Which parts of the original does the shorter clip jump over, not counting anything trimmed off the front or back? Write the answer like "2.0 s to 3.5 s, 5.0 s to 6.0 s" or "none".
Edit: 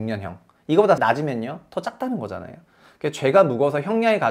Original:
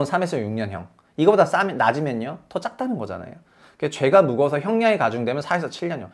1.5 s to 1.8 s